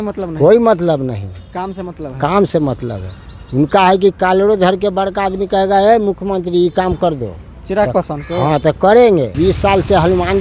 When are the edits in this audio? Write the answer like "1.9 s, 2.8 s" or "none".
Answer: 9.3 s

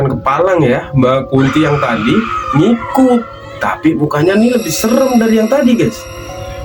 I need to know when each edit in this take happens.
none

